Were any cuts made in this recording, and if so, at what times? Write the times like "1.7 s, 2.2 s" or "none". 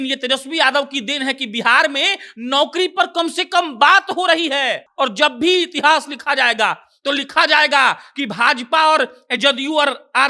4.8 s